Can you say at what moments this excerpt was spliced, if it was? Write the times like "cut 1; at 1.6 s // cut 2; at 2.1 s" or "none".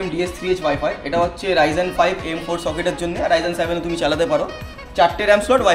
none